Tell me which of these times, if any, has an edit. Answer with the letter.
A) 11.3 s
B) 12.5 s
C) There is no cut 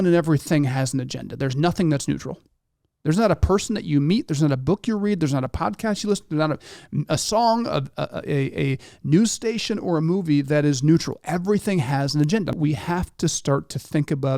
B